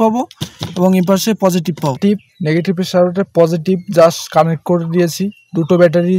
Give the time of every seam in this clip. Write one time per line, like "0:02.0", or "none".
0:02.0